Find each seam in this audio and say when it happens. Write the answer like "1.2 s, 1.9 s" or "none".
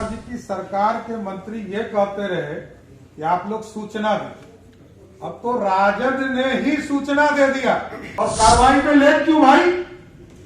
8.0 s